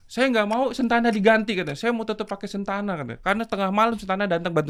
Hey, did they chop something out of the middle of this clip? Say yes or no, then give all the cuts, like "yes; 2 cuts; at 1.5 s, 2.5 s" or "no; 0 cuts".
no; 0 cuts